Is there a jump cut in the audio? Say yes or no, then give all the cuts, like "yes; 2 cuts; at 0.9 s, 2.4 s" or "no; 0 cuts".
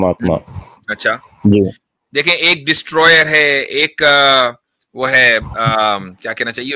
no; 0 cuts